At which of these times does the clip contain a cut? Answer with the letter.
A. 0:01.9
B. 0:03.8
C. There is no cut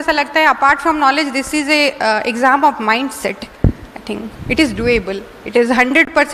C